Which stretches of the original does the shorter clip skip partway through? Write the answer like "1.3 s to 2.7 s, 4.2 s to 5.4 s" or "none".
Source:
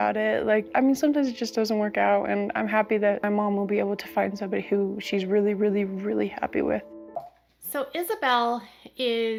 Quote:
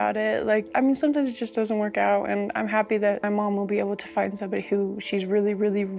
none